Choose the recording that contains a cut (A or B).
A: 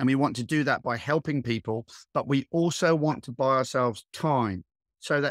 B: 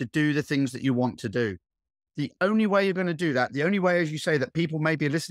B